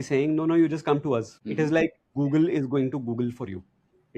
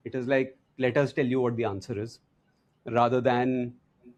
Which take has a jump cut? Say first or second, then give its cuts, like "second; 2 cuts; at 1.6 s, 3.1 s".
first; 1 cut; at 1.4 s